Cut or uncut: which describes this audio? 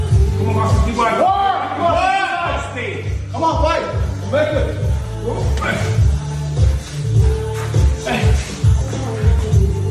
uncut